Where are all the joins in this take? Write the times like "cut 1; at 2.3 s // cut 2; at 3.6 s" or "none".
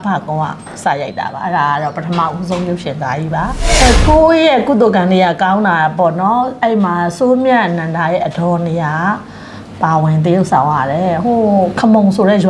none